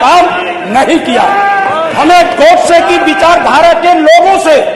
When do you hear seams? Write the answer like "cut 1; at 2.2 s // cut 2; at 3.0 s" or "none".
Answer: cut 1; at 1.9 s